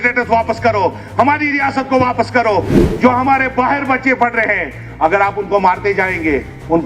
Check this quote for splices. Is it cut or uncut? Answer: cut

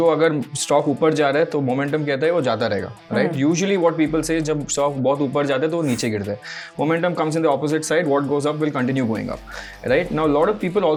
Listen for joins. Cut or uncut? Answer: uncut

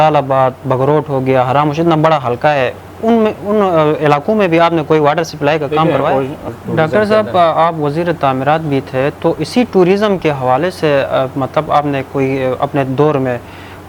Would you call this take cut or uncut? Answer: cut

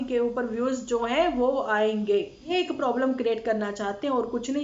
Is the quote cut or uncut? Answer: cut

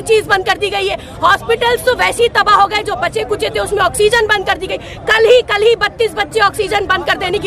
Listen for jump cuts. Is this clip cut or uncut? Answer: uncut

